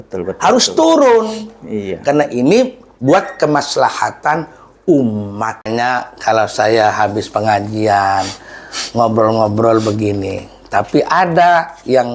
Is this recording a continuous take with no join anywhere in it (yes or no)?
no